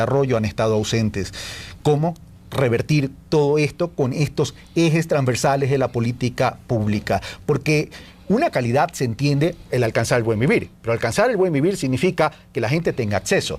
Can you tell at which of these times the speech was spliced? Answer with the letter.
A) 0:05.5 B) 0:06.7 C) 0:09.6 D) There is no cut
A